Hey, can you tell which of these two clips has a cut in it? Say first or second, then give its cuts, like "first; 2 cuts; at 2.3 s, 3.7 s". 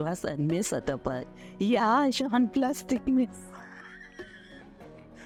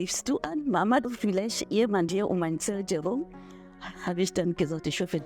second; 1 cut; at 1.1 s